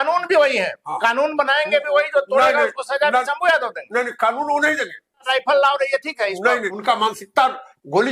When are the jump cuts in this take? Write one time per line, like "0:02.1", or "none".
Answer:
0:05.3
0:06.7